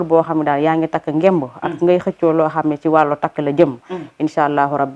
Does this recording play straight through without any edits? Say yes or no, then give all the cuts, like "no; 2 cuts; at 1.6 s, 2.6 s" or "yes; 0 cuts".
yes; 0 cuts